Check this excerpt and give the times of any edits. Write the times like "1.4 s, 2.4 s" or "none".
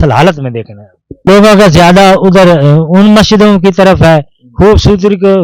1.3 s